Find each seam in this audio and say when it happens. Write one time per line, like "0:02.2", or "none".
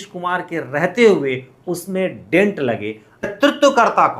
0:03.3

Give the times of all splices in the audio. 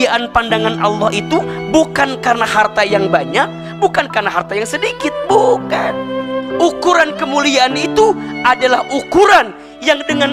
0:06.2

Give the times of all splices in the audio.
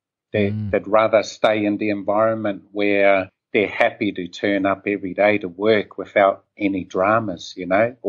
0:03.4

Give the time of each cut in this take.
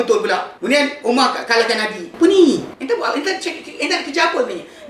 none

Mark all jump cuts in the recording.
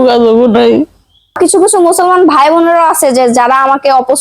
0:01.4

